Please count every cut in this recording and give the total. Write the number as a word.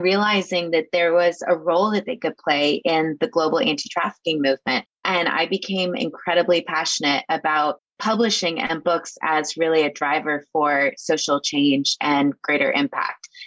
one